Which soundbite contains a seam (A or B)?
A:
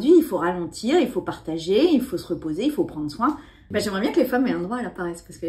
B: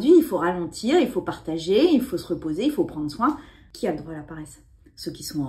B